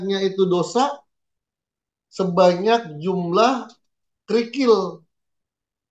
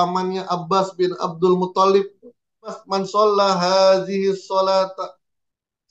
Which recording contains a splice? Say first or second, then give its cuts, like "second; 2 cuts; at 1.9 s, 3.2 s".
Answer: second; 1 cut; at 2.8 s